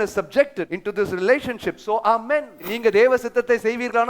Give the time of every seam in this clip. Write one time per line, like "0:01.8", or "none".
0:02.7